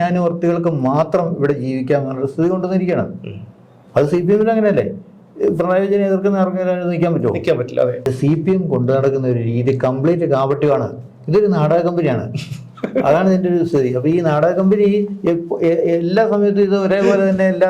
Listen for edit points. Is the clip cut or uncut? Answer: cut